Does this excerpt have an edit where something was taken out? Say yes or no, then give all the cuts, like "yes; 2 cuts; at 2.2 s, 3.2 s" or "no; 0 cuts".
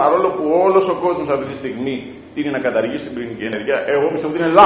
yes; 1 cut; at 3.5 s